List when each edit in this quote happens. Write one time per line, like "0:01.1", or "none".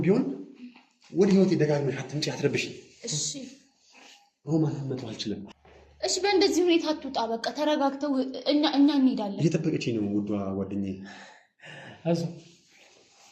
0:05.5